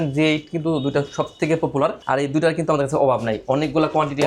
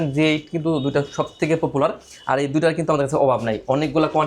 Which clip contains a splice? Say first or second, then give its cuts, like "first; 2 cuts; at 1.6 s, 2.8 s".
first; 1 cut; at 2.0 s